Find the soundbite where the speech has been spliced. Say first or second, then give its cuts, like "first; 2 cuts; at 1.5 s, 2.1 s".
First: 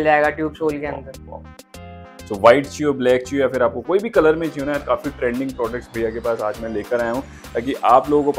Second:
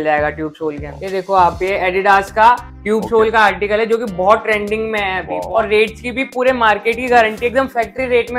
second; 2 cuts; at 0.9 s, 5.4 s